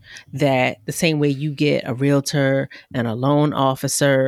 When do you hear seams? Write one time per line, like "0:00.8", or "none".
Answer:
none